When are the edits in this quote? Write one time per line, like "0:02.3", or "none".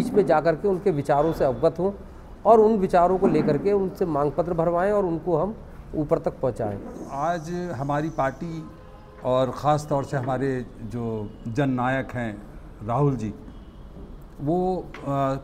0:07.0